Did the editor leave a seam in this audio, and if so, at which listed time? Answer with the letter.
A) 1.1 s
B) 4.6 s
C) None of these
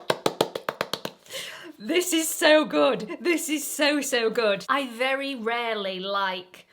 B